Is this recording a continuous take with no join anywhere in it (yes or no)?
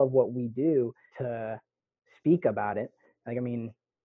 no